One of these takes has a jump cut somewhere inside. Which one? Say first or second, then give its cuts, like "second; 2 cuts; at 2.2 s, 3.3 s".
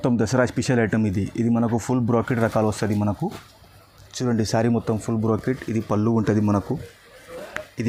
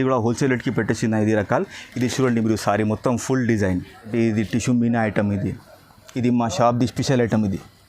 second; 1 cut; at 4.1 s